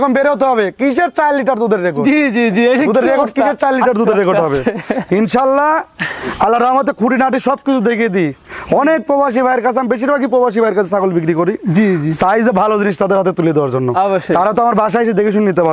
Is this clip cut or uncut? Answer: uncut